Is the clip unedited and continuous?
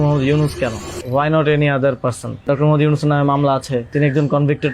no; 3 cuts; at 0.9 s, 2.4 s, 3.9 s

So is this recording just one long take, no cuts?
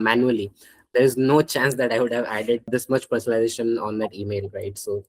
no; 2 cuts; at 0.8 s, 2.7 s

